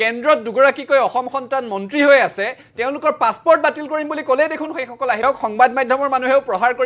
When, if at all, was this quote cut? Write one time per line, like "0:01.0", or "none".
0:05.2